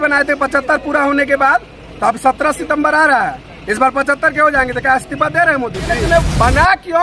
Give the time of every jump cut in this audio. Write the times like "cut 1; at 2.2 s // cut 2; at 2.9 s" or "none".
cut 1; at 6.0 s